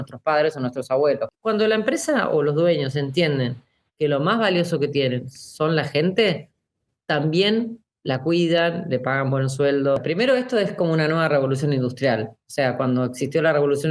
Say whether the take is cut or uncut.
cut